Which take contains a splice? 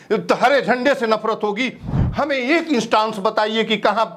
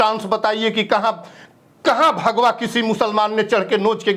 first; 1 cut; at 1.8 s

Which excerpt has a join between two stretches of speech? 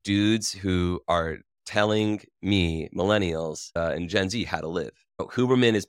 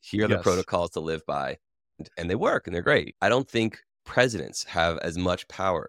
second; 2 cuts; at 2.0 s, 3.1 s

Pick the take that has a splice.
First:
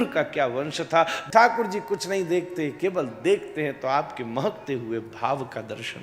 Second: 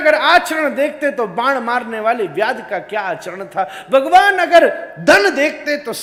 first; 1 cut; at 1.2 s

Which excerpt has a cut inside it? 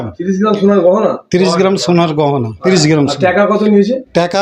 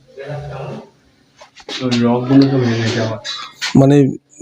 first; 1 cut; at 2.5 s

